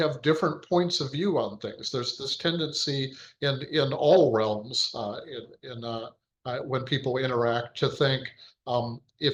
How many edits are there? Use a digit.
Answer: 0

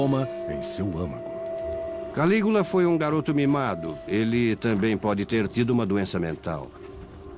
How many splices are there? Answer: 0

